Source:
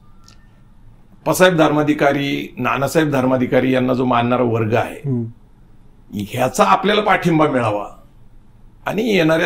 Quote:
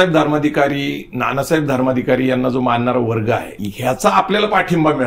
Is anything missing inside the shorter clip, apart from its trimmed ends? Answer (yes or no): yes